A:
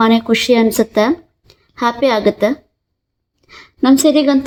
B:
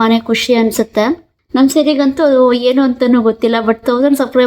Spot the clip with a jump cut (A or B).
B